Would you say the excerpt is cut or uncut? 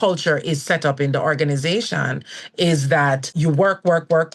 cut